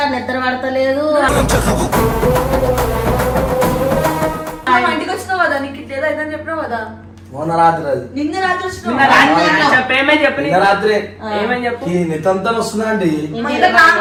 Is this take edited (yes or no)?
no